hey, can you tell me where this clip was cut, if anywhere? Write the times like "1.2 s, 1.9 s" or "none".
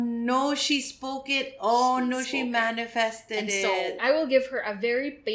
4.0 s